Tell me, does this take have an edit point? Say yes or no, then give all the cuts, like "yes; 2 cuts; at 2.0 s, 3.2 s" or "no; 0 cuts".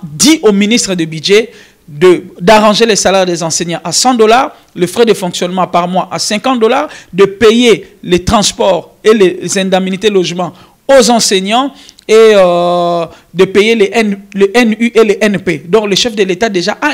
no; 0 cuts